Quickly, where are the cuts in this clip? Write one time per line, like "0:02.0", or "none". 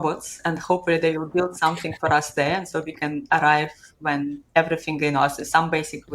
none